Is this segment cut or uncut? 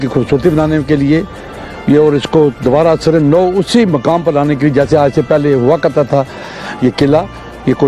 uncut